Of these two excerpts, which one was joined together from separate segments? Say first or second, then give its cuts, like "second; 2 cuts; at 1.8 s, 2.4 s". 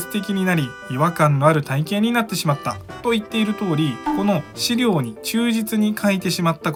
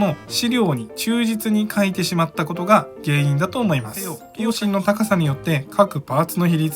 second; 1 cut; at 4.3 s